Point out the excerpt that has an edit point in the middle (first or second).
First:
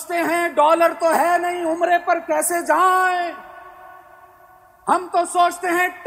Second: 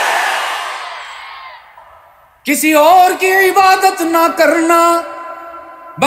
second